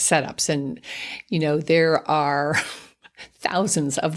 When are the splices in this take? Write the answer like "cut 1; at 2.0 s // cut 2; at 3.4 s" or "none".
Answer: none